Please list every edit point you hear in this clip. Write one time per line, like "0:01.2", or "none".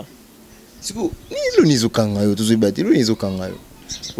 none